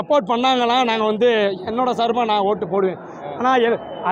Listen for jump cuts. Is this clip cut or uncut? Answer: uncut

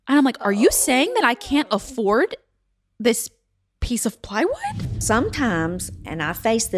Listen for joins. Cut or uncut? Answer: cut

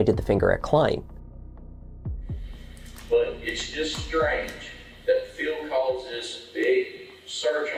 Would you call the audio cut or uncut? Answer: uncut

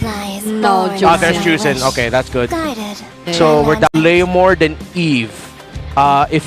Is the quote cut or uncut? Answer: cut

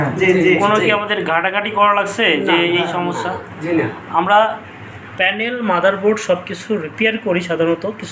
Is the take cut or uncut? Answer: uncut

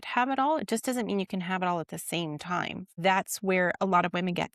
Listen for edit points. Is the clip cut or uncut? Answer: cut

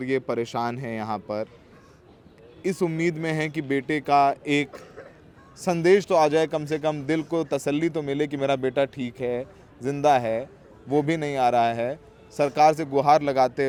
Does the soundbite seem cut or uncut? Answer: uncut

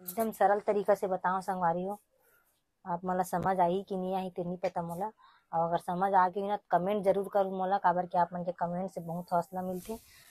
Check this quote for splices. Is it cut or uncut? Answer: uncut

